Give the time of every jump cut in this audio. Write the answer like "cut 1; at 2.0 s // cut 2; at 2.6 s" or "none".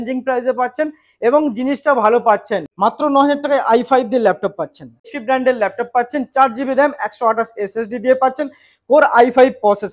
cut 1; at 2.7 s // cut 2; at 5.1 s